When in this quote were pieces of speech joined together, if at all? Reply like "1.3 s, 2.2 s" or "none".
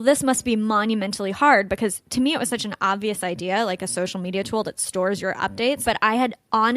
5.8 s